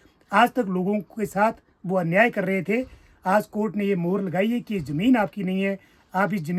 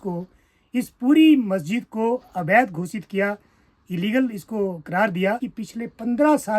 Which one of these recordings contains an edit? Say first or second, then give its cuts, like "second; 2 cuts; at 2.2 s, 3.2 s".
second; 1 cut; at 5.5 s